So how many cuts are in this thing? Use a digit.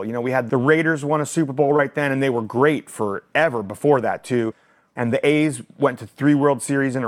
0